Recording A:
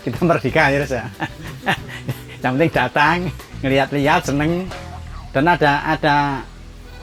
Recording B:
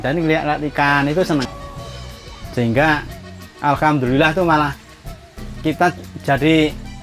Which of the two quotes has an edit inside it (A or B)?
B